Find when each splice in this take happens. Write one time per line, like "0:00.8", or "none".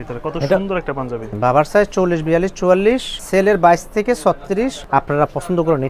0:01.3
0:03.1
0:04.8